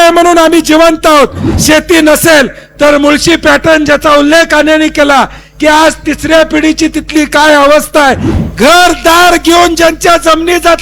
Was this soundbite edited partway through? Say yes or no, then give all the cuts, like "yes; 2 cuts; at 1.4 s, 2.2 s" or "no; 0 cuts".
yes; 2 cuts; at 1.4 s, 8.3 s